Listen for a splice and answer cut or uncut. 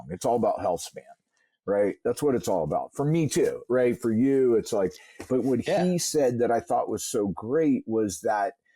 uncut